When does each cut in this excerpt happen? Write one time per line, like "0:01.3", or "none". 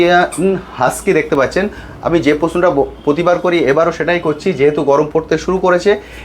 none